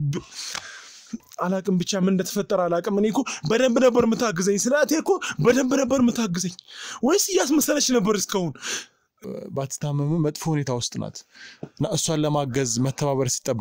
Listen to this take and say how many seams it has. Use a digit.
1